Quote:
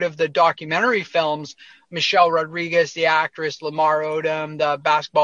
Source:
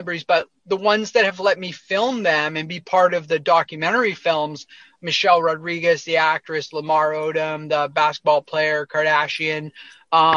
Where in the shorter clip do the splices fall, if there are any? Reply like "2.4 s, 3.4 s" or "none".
none